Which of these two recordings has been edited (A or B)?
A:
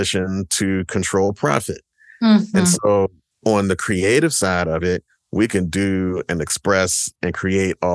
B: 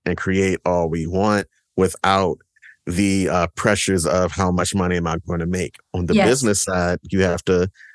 A